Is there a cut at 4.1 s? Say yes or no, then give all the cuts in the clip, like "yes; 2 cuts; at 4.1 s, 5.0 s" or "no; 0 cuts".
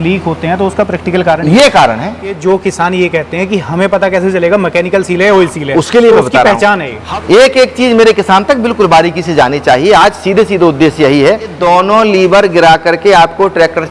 no; 3 cuts; at 2.3 s, 6.9 s, 11.6 s